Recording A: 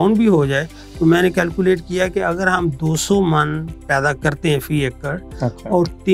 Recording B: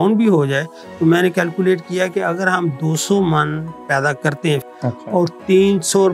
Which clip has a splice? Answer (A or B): B